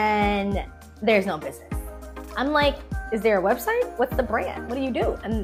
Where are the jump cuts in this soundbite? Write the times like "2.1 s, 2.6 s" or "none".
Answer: none